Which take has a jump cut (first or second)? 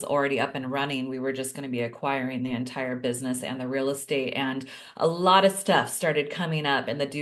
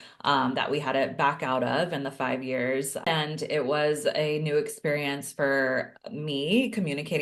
second